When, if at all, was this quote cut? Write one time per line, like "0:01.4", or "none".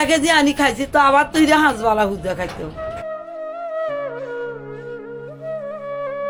none